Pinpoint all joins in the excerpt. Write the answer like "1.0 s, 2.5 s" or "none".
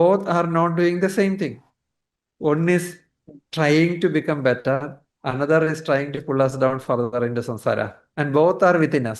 8.1 s

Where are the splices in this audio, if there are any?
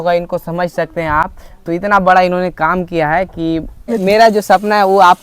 3.9 s

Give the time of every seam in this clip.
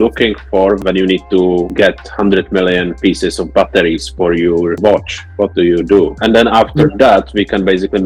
none

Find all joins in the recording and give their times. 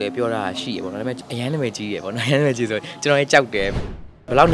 1.2 s, 3.7 s

